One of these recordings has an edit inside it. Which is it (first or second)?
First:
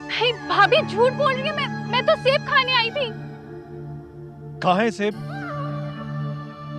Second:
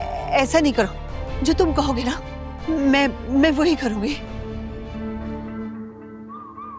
second